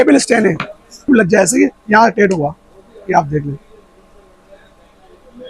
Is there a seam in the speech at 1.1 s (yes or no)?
yes